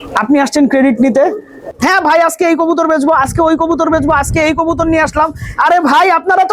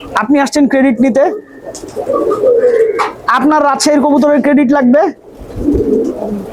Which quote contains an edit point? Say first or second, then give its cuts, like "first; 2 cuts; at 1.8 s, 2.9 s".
first; 1 cut; at 1.6 s